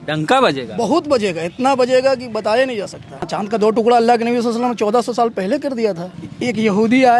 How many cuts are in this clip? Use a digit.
2